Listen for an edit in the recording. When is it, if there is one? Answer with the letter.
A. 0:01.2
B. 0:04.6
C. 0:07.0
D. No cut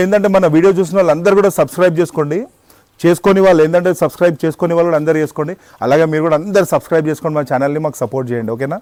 D